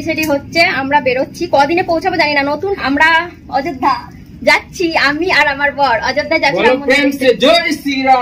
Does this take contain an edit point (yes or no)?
yes